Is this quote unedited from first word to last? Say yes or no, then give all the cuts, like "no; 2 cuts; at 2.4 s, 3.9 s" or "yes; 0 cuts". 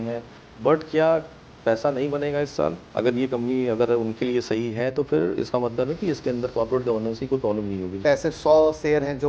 no; 2 cuts; at 2.8 s, 8.0 s